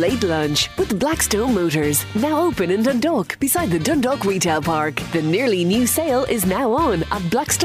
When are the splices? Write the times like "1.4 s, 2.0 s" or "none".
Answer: none